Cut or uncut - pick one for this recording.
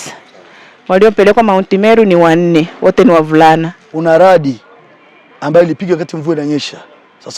cut